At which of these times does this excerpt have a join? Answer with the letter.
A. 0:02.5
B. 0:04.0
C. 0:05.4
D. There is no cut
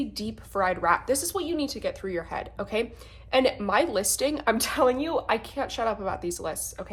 D